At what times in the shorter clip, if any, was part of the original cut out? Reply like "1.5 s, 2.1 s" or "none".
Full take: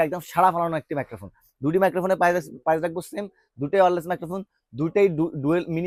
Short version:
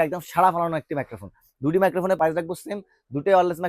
2.2 s